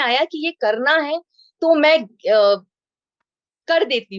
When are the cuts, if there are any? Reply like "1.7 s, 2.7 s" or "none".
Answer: none